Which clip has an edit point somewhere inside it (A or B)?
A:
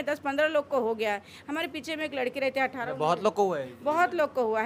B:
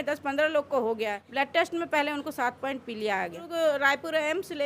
B